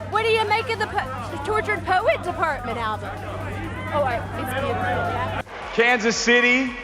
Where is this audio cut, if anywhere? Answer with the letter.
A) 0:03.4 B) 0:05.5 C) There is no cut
B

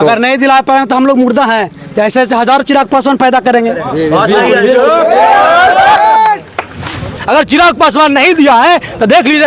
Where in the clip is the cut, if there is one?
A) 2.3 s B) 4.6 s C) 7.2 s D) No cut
C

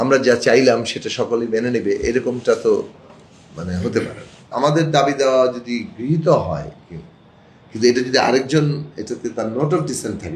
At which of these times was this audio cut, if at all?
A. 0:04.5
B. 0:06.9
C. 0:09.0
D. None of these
A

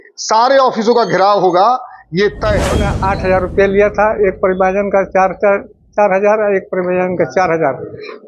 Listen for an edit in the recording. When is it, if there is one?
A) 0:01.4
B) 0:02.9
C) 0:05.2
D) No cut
B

